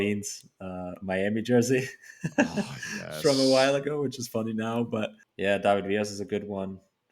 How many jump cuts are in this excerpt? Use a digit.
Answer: 1